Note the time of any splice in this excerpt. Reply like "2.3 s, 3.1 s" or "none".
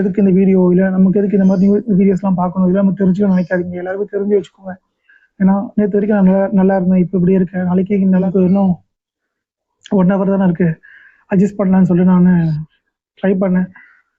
8.2 s